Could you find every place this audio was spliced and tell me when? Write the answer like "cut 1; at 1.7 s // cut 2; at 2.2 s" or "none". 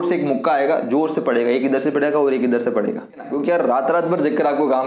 cut 1; at 3.3 s